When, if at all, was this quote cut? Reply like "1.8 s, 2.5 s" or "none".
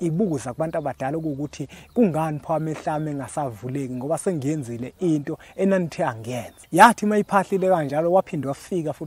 6.5 s